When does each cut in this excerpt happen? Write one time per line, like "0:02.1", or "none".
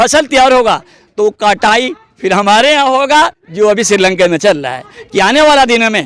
0:05.0